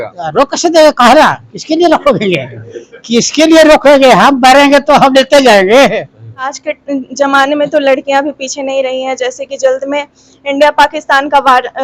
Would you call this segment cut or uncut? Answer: cut